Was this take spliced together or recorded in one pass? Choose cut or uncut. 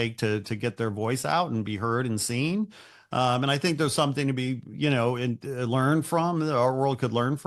uncut